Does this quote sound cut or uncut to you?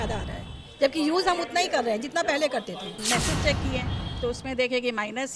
cut